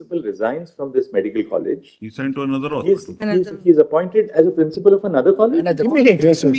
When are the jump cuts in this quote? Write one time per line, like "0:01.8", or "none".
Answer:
none